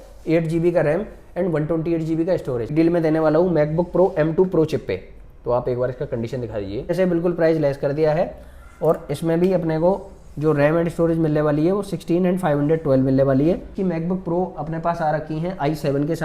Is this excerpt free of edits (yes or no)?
no